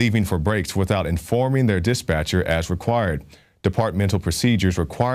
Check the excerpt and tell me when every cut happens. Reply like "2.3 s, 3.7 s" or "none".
none